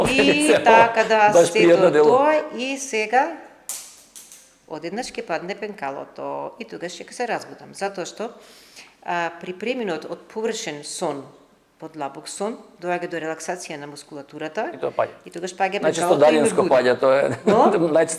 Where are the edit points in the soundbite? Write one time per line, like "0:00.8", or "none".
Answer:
none

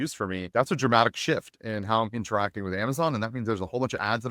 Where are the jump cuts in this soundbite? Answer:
none

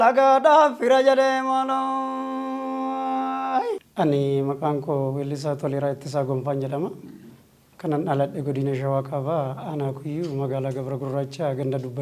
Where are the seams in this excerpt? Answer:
0:03.9

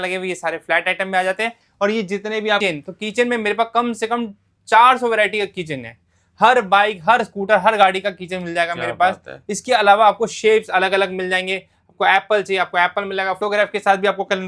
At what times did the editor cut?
0:02.6
0:13.4

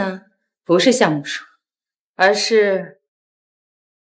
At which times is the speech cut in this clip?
none

